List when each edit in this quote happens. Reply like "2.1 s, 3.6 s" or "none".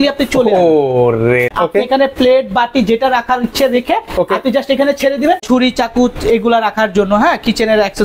1.5 s, 5.4 s